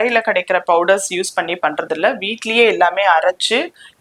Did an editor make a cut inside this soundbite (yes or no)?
no